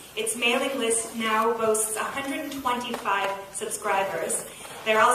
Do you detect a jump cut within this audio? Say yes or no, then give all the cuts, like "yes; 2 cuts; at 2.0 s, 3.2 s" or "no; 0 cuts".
no; 0 cuts